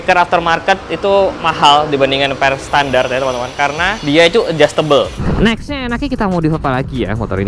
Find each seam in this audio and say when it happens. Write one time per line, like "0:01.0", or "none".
0:01.4
0:04.0
0:05.2